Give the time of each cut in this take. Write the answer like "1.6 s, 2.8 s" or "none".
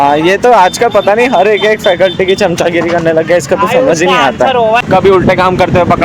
4.8 s